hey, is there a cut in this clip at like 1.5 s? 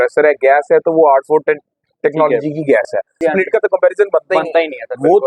no; 1 cut; at 3.2 s

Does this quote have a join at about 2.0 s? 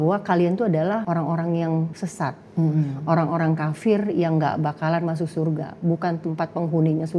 yes; 2 cuts; at 1.0 s, 2.0 s

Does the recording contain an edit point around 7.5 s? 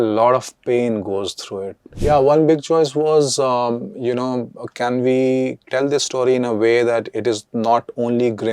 no; 2 cuts; at 1.9 s, 5.6 s

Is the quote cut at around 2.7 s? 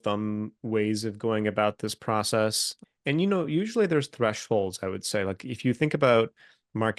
yes; 1 cut; at 2.7 s

